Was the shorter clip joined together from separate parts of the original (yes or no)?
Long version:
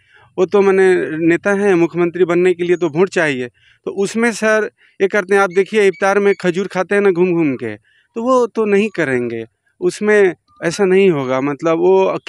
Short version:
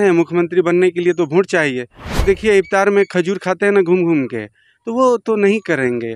yes